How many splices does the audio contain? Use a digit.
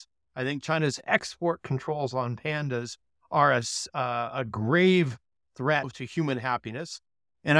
2